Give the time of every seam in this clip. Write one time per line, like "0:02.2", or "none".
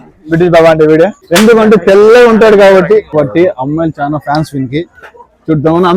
0:01.2
0:03.1